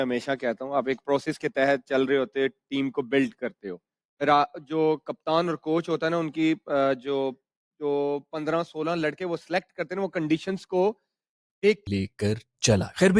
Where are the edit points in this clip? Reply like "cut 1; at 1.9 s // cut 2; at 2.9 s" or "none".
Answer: cut 1; at 11.8 s